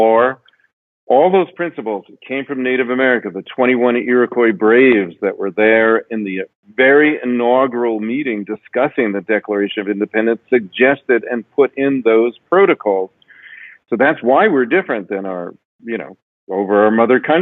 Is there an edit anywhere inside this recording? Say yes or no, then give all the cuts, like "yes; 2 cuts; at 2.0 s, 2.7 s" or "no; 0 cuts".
no; 0 cuts